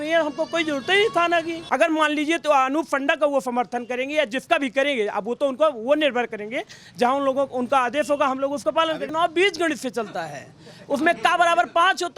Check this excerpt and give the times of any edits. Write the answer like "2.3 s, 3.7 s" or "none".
1.6 s, 9.1 s